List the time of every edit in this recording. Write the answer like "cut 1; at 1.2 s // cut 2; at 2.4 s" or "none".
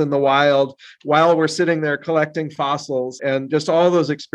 cut 1; at 3.1 s

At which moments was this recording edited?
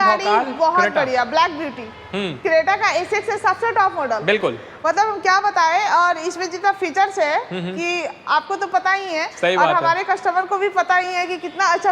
none

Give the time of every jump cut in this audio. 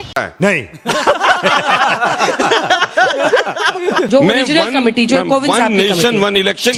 none

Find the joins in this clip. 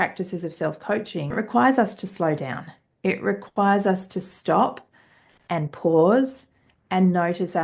cut 1; at 1.3 s

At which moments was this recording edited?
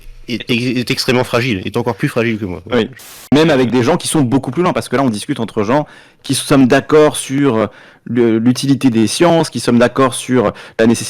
none

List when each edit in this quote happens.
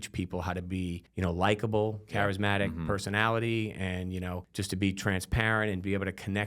cut 1; at 1.0 s // cut 2; at 2.0 s // cut 3; at 4.5 s

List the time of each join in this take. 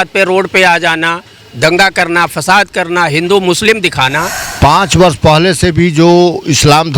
cut 1; at 4.4 s

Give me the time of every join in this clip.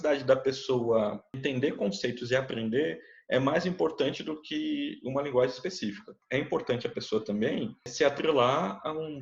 cut 1; at 1.4 s // cut 2; at 6.2 s // cut 3; at 7.9 s

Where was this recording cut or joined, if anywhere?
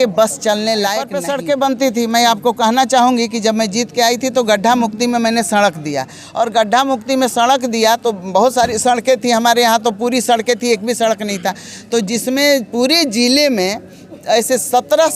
cut 1; at 1.2 s

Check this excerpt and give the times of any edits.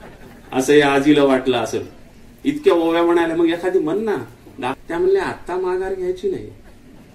cut 1; at 4.7 s

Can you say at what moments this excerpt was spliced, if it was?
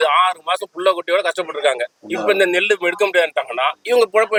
none

